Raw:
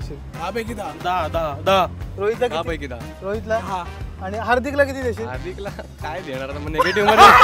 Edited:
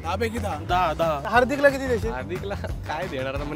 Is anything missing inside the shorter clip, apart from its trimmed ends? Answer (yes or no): yes